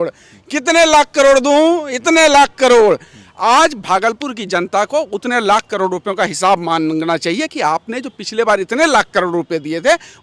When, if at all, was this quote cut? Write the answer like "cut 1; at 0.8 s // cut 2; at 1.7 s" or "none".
none